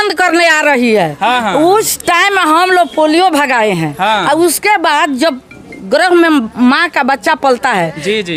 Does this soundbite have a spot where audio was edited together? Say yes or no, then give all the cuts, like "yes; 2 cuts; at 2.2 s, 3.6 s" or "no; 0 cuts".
no; 0 cuts